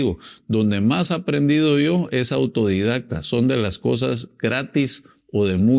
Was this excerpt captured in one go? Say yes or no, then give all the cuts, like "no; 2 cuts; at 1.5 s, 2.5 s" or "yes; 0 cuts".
yes; 0 cuts